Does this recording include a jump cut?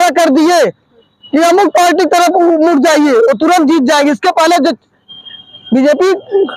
no; 0 cuts

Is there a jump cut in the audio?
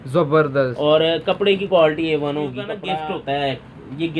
yes; 1 cut; at 2.8 s

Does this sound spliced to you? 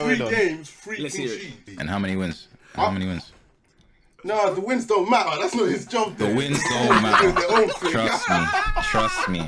yes; 1 cut; at 1.7 s

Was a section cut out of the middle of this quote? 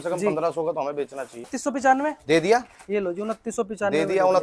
yes; 1 cut; at 1.6 s

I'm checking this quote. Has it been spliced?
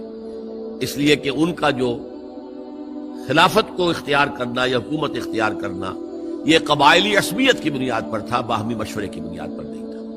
yes; 1 cut; at 9.3 s

